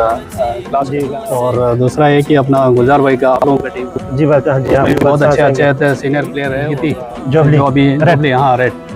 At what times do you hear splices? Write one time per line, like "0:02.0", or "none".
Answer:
0:01.1
0:06.7